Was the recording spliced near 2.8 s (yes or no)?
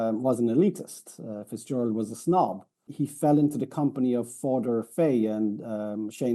yes